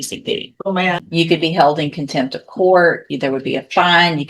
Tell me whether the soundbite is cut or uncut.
cut